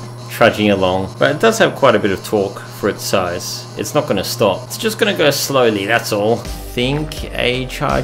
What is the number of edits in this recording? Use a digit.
3